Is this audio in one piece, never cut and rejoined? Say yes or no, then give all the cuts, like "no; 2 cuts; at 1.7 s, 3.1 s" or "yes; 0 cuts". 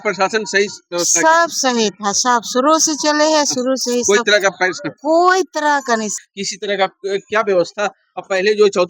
no; 1 cut; at 6.1 s